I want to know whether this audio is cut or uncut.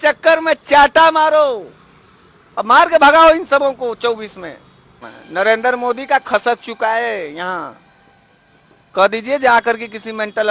cut